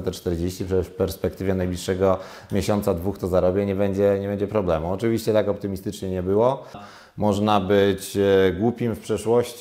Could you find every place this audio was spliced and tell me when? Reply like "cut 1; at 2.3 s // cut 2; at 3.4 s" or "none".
cut 1; at 6.9 s